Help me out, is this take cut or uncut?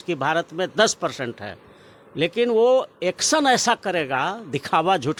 uncut